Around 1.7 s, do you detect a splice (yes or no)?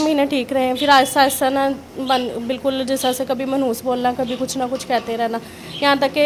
no